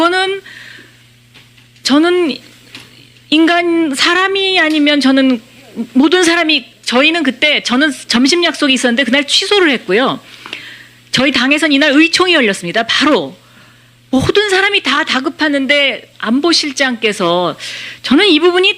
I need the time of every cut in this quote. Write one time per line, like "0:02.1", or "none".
0:06.3